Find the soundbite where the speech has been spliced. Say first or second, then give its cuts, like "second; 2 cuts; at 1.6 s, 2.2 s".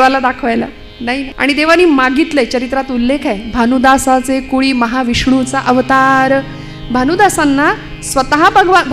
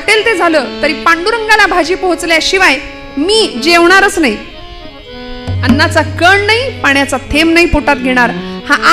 first; 1 cut; at 1.3 s